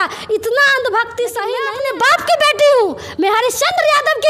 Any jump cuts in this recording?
yes; 1 cut; at 1.7 s

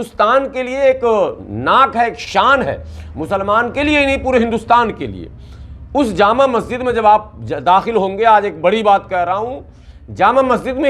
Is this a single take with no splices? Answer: yes; 0 cuts

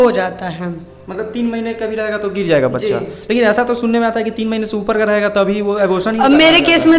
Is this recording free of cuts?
yes; 0 cuts

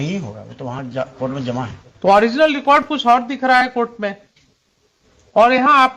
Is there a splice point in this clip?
no; 0 cuts

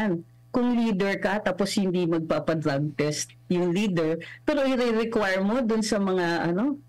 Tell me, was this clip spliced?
no; 0 cuts

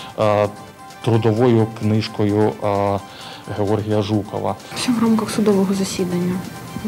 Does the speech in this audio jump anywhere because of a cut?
yes; 1 cut; at 4.7 s

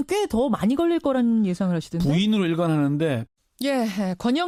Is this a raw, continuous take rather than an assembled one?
yes; 0 cuts

